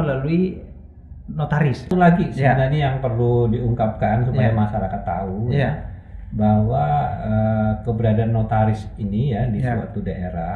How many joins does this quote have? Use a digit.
1